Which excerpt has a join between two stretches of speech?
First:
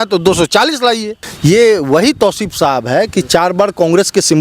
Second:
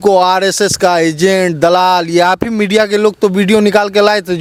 first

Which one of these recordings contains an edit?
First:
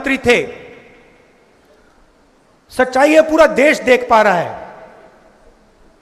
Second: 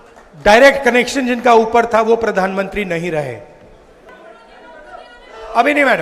second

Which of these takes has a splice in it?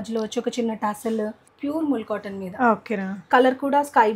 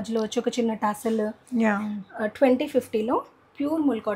first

